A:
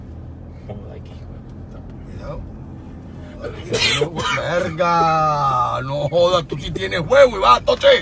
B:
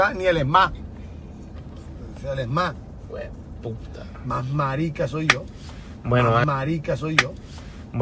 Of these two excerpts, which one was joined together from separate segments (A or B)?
B